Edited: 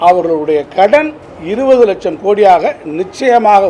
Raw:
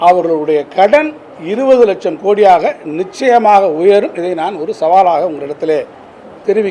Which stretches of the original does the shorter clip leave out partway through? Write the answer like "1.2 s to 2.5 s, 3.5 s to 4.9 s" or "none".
none